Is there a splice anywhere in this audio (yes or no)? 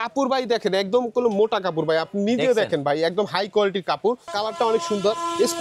yes